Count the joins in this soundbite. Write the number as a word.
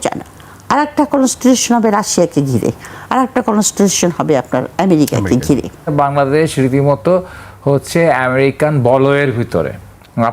one